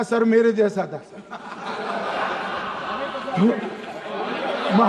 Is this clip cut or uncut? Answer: uncut